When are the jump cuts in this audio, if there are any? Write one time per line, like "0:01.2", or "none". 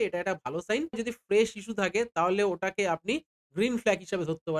0:01.0

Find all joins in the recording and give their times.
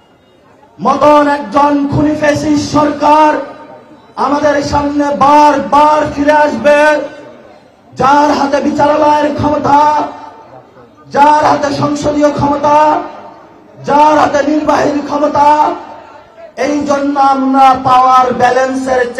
none

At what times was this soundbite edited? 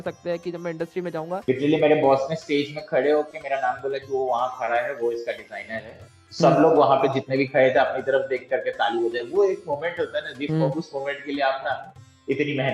0:01.4

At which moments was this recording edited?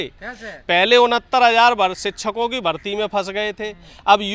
none

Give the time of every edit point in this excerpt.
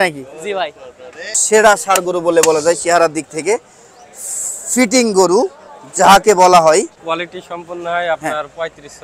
0:01.4
0:07.0

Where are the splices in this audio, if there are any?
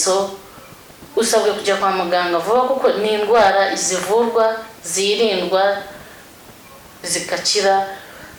none

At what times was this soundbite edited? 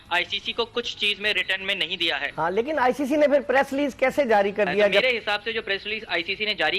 0:02.3
0:05.0

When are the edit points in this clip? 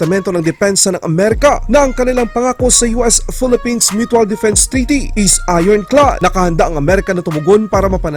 none

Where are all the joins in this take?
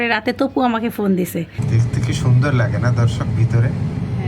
0:01.6

